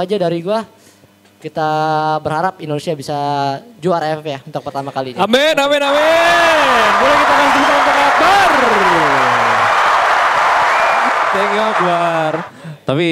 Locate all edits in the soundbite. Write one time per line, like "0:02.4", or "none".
none